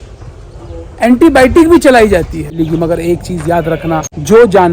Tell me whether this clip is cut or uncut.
cut